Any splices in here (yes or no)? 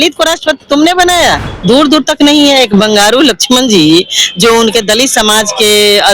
yes